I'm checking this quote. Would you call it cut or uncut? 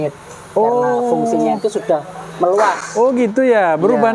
uncut